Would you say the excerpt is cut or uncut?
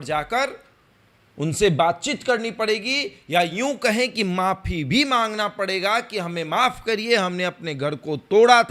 uncut